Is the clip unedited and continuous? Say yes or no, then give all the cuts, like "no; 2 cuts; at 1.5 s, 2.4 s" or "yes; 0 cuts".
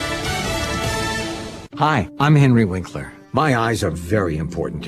no; 1 cut; at 1.6 s